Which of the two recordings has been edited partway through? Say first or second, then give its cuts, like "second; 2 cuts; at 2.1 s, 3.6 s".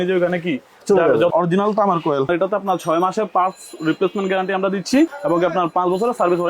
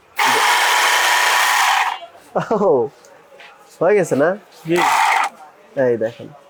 first; 3 cuts; at 1.3 s, 2.3 s, 5.2 s